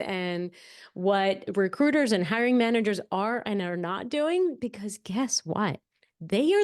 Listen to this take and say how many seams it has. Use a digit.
1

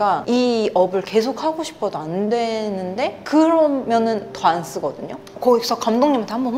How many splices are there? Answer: 0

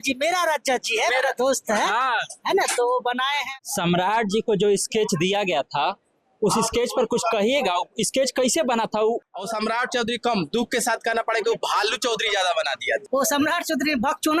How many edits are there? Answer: 3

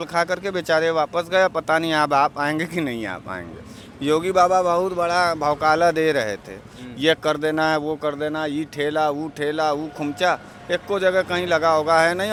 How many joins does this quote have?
0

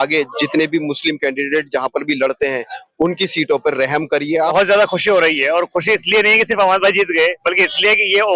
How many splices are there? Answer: 1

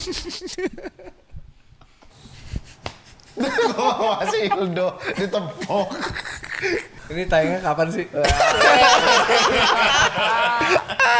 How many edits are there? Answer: 2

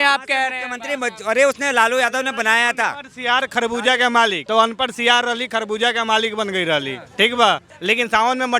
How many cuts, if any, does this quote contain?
2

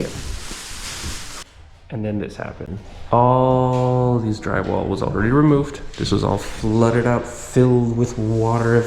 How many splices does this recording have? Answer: 1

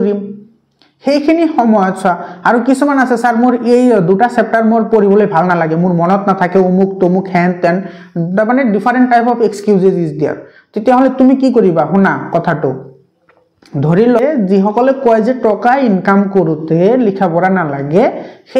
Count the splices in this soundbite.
1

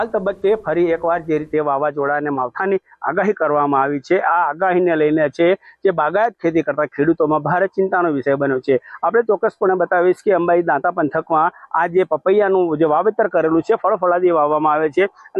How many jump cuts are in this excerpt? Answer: 0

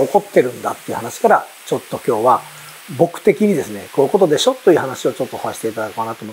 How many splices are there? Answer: 0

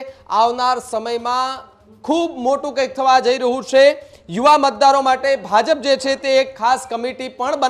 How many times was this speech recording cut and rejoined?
0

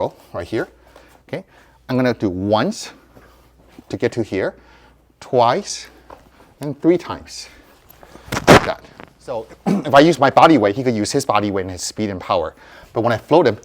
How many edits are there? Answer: 1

